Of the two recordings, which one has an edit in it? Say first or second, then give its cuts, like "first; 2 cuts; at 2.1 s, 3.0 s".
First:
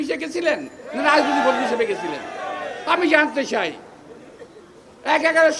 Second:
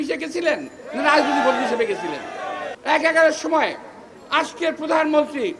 second; 1 cut; at 2.7 s